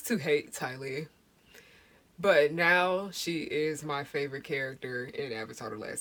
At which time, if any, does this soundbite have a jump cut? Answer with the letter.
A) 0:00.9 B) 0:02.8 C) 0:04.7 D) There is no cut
D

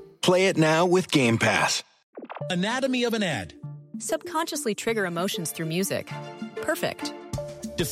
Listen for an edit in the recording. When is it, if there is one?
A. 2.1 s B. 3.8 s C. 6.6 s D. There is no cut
A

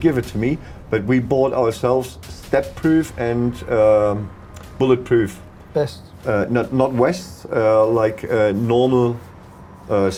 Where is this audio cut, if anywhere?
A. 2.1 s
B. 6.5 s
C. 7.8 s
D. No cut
D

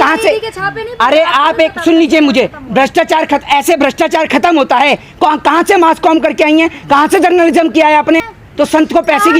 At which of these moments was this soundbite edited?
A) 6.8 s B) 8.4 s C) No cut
B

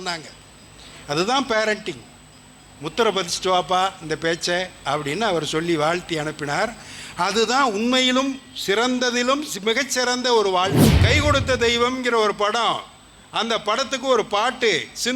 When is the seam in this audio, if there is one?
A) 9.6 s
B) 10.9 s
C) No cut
B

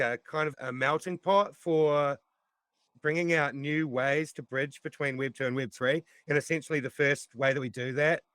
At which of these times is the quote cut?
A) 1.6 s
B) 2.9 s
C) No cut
B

